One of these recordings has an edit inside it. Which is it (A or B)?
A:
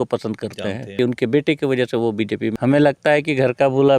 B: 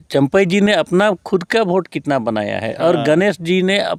A